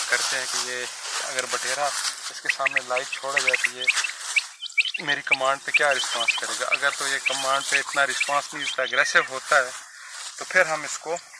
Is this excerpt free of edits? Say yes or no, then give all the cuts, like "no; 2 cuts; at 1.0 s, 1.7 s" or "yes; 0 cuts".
yes; 0 cuts